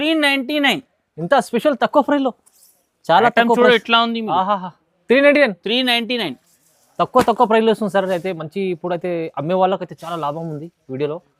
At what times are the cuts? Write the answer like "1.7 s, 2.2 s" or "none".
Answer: none